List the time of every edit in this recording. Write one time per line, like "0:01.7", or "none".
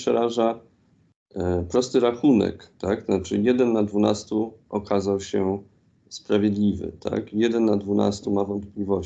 none